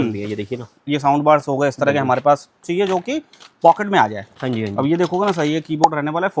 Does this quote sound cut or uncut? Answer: cut